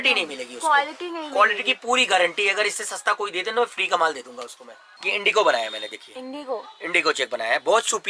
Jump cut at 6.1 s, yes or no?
no